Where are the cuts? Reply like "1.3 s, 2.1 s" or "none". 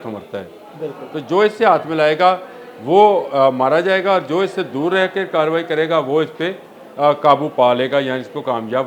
none